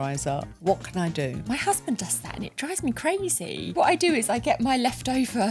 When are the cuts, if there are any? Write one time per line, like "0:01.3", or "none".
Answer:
0:01.4
0:03.7